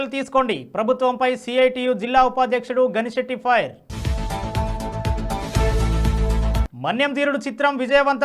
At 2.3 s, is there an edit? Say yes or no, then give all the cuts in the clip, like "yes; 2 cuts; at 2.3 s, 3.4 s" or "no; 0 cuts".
no; 0 cuts